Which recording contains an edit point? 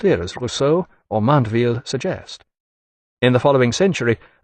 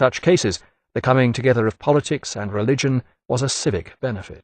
second; 1 cut; at 1.1 s

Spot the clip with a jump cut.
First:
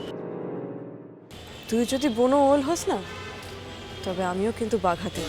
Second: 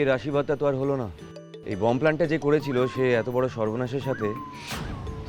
second; 1 cut; at 1.6 s

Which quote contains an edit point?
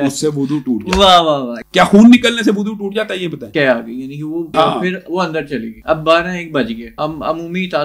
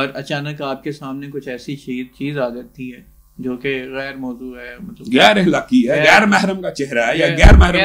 first; 5 cuts; at 1.5 s, 3.4 s, 4.5 s, 5.7 s, 6.9 s

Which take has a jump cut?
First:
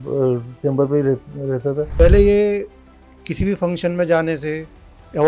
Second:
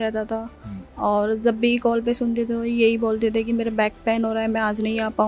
first; 1 cut; at 1.9 s

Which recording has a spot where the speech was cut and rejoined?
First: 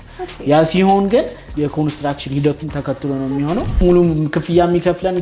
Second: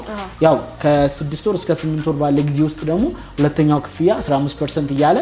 first; 1 cut; at 3.8 s

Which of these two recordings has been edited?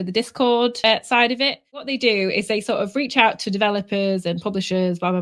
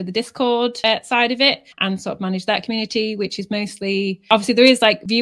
first; 1 cut; at 1.8 s

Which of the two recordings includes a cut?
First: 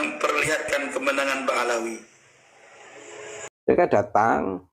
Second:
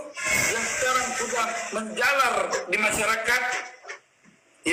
first; 1 cut; at 3.5 s

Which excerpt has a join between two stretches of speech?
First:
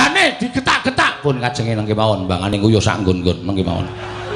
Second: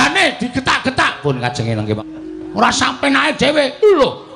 second; 1 cut; at 2.0 s

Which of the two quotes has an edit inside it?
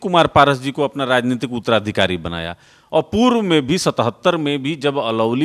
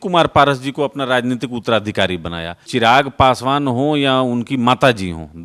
second; 1 cut; at 2.6 s

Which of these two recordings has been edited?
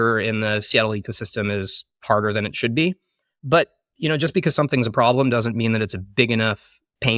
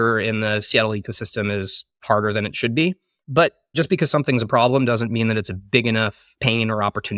second; 2 cuts; at 3.3 s, 6.2 s

